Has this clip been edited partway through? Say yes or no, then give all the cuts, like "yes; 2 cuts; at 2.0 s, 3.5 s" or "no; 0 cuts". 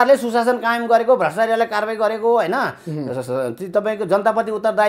no; 0 cuts